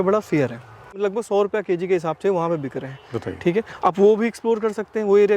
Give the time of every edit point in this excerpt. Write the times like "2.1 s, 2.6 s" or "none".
1.0 s